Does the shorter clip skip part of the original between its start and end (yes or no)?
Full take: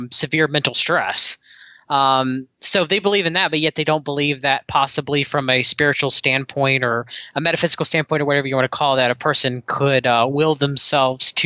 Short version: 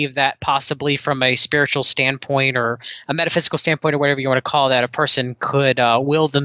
no